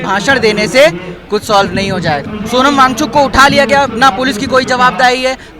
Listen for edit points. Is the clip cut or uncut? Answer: cut